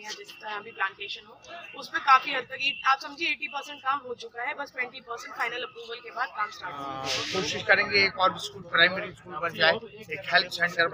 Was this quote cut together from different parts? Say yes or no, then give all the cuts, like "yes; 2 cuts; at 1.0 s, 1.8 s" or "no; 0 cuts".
yes; 1 cut; at 6.8 s